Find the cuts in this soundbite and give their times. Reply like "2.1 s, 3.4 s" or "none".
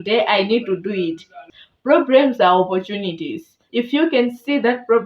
1.4 s, 3.6 s